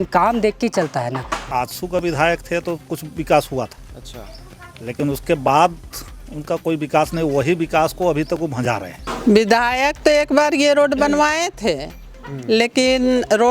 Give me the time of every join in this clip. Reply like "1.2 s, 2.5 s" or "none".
1.4 s, 9.0 s